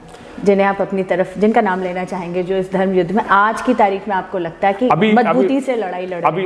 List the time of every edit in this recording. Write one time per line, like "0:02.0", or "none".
none